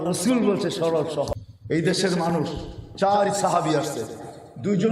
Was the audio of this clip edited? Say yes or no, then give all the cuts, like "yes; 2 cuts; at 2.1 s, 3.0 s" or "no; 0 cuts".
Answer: yes; 1 cut; at 1.5 s